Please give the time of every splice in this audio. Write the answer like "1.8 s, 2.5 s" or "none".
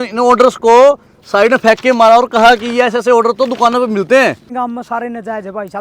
4.5 s